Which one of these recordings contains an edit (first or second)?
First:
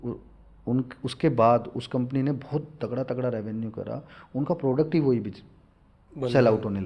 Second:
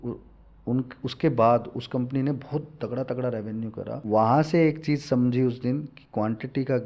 second